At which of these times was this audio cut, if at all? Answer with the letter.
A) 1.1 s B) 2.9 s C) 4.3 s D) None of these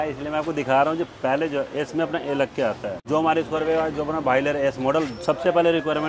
B